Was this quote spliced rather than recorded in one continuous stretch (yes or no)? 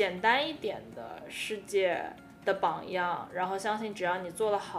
no